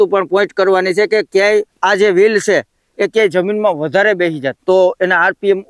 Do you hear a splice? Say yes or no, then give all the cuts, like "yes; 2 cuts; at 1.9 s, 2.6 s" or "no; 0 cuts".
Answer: yes; 2 cuts; at 1.7 s, 4.5 s